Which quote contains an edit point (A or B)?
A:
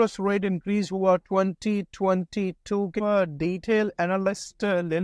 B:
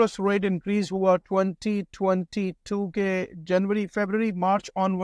A